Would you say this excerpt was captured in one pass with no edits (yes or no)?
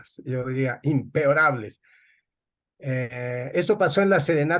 yes